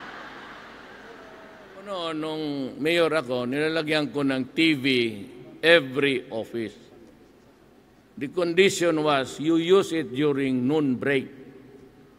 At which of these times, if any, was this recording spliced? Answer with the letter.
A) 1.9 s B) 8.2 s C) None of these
A